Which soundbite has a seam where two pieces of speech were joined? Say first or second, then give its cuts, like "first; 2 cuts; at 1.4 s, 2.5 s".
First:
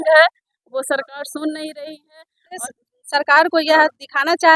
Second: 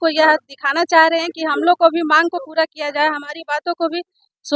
first; 1 cut; at 2.6 s